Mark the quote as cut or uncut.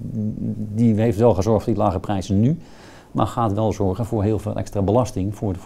uncut